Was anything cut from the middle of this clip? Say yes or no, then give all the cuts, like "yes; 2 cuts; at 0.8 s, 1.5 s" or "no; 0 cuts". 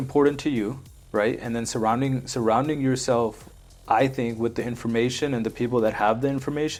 no; 0 cuts